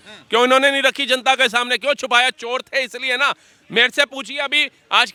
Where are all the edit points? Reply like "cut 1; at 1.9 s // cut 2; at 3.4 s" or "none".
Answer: none